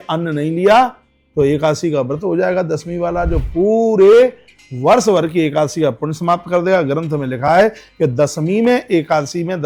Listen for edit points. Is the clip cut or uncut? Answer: uncut